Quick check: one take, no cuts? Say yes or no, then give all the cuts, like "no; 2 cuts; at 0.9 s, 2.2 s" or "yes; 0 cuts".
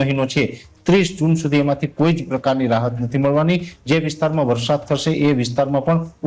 yes; 0 cuts